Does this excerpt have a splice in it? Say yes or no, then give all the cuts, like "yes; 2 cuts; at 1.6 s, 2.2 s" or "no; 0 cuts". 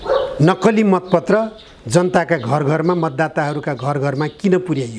no; 0 cuts